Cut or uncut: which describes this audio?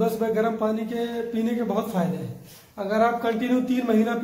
uncut